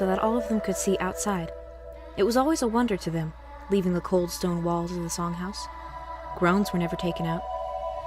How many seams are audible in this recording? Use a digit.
1